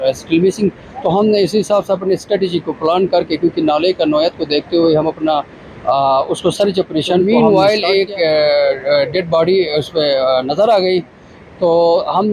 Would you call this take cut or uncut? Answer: cut